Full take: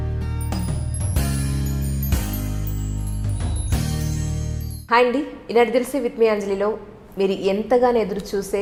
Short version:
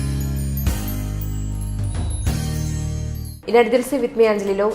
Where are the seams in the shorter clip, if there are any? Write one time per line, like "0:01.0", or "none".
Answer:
0:03.3